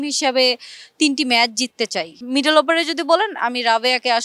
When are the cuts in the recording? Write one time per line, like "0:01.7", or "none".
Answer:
0:02.2